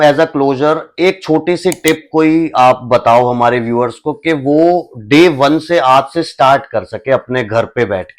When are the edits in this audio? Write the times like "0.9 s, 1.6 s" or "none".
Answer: none